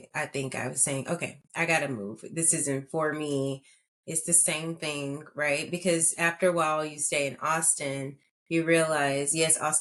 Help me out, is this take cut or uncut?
uncut